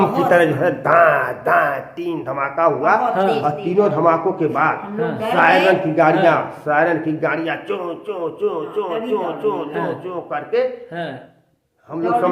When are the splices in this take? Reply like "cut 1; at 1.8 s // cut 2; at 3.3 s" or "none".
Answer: none